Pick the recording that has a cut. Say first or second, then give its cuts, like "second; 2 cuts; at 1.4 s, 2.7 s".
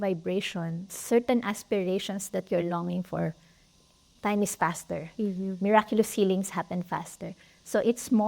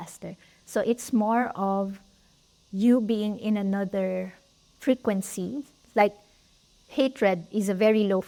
first; 2 cuts; at 0.9 s, 4.1 s